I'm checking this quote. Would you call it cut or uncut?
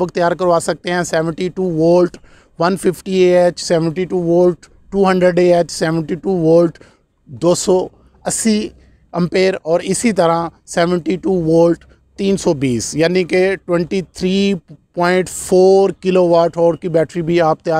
uncut